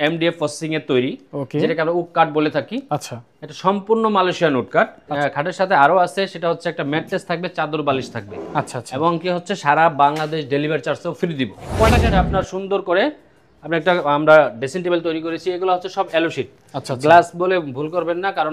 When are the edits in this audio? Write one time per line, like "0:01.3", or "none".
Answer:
0:05.1
0:12.0

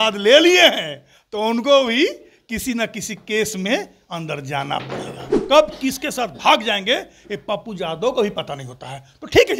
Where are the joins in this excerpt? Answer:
0:05.4

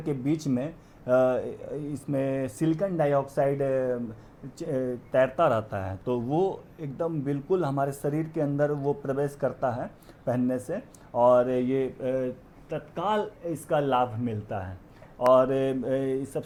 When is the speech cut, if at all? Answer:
none

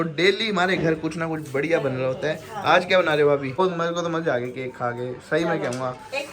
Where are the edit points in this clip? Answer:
0:03.6

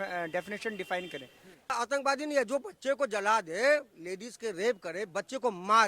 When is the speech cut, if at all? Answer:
0:01.7

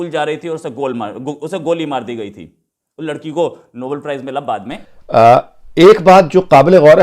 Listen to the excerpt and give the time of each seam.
0:04.8

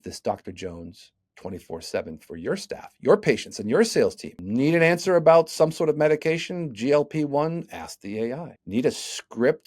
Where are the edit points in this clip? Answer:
0:04.3
0:08.5

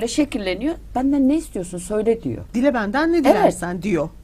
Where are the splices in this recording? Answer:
none

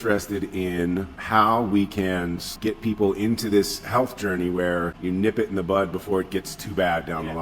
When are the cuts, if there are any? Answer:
0:01.2
0:02.5

